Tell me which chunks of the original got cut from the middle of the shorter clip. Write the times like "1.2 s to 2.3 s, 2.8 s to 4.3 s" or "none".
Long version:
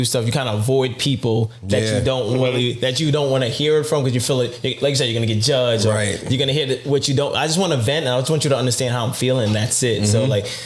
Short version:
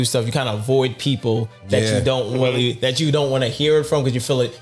none